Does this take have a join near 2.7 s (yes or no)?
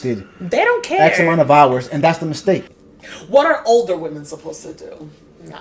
yes